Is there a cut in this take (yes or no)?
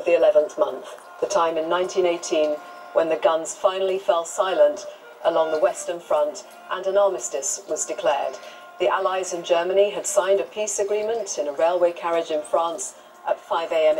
no